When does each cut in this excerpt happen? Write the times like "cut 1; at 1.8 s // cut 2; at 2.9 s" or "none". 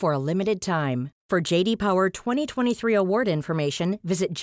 none